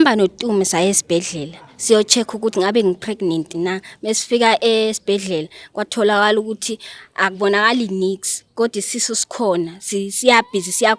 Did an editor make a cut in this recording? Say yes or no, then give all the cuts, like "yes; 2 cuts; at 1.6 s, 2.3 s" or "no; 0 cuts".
no; 0 cuts